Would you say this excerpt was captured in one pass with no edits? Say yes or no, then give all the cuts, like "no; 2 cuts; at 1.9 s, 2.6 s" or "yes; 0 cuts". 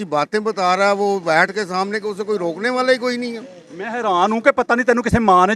yes; 0 cuts